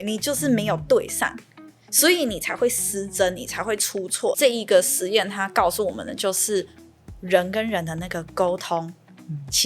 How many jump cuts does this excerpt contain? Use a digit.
1